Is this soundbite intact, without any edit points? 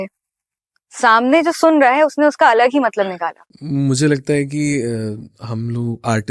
no; 1 cut; at 3.5 s

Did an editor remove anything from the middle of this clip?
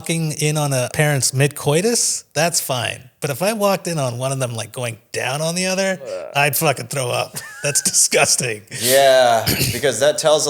yes; 1 cut; at 0.9 s

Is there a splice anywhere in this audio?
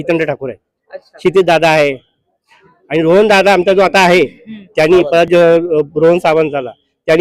no; 0 cuts

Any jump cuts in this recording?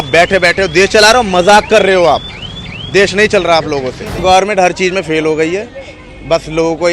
yes; 1 cut; at 4.1 s

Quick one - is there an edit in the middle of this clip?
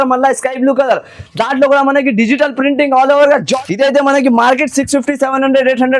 yes; 1 cut; at 3.5 s

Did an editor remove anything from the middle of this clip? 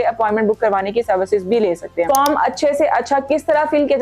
yes; 1 cut; at 2.1 s

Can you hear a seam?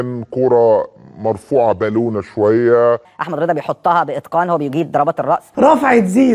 no; 0 cuts

